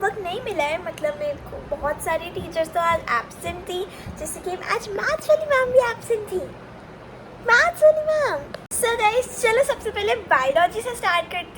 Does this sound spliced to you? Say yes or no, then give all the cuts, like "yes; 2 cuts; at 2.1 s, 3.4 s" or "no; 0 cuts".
yes; 1 cut; at 8.5 s